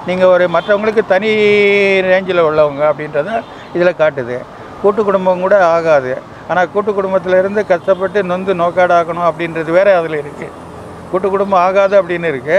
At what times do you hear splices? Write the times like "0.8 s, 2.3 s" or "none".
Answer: none